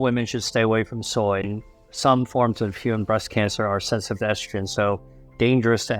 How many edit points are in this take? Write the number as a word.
one